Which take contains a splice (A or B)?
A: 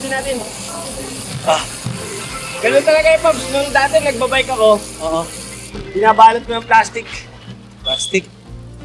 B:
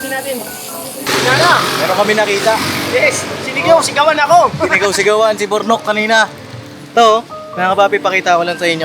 B